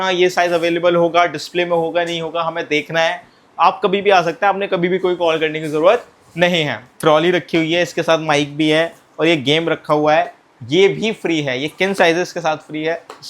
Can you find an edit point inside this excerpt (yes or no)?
yes